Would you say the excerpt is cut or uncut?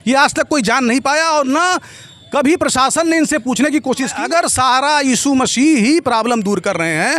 cut